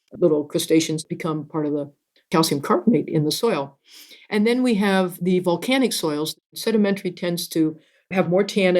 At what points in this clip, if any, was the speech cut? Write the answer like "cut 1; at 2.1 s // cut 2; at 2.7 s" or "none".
cut 1; at 1.0 s // cut 2; at 6.4 s